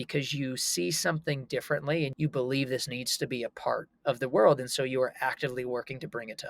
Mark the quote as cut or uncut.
cut